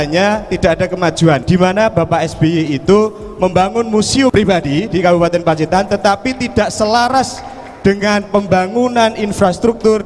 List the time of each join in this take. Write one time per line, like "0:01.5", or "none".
0:01.4
0:04.3